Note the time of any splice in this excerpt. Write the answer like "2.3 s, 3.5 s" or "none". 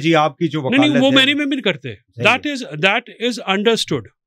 none